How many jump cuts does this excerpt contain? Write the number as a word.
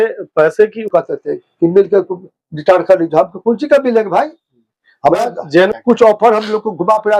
two